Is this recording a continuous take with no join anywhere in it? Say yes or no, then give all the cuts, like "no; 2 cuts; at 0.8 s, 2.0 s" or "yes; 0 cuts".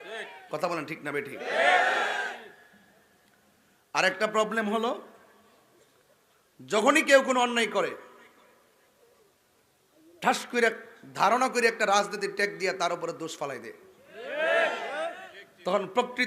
yes; 0 cuts